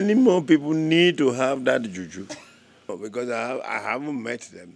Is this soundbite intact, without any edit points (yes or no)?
no